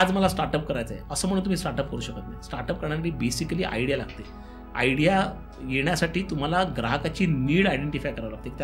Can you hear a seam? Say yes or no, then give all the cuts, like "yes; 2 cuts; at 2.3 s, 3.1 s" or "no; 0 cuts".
no; 0 cuts